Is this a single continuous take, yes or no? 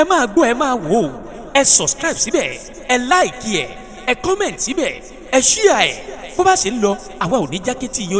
yes